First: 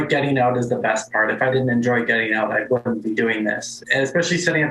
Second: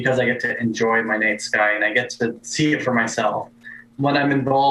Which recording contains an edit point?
first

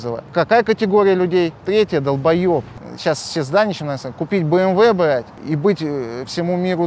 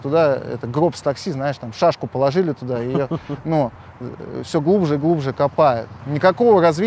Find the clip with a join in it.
first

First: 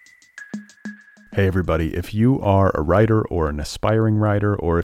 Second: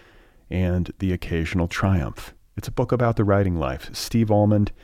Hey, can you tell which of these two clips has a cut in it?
first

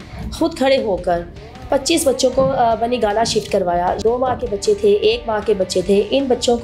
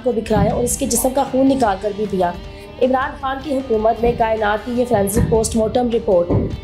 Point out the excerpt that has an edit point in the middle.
first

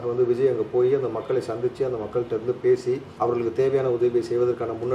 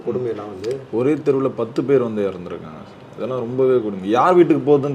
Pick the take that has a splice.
first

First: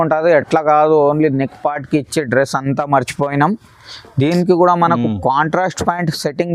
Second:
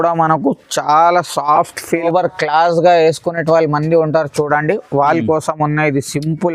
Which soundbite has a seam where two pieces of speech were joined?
second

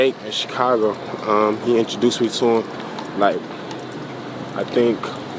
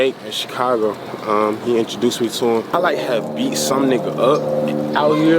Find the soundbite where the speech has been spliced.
second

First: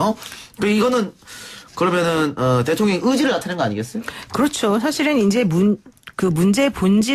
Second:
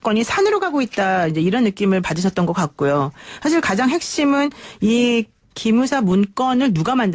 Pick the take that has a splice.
first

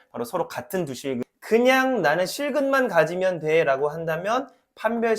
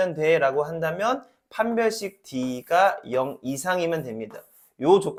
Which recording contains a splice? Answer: first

